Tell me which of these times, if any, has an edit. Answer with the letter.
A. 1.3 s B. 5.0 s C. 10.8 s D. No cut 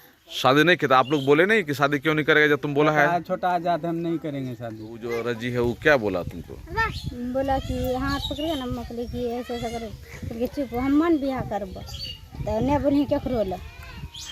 B